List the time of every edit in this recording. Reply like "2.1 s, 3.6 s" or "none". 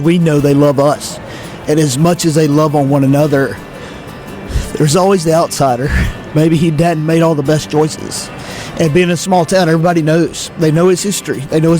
6.3 s